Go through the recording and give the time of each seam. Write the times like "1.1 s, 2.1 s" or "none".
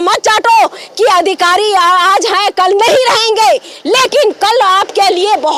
none